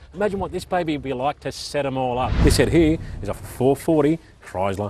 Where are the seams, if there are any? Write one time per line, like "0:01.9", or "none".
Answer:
0:02.3